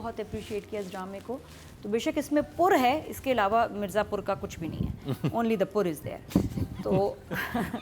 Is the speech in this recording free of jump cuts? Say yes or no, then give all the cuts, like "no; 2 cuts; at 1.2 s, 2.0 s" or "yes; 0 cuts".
yes; 0 cuts